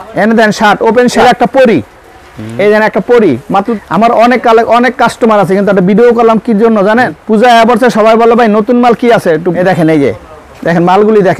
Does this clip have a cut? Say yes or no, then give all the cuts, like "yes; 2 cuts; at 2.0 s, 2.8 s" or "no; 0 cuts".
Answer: yes; 4 cuts; at 1.2 s, 3.7 s, 7.2 s, 9.6 s